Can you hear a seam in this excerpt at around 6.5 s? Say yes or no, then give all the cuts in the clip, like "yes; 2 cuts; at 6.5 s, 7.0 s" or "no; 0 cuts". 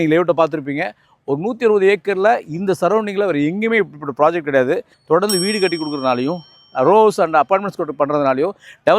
no; 1 cut; at 4.9 s